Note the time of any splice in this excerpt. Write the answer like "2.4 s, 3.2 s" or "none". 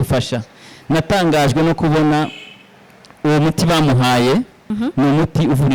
4.7 s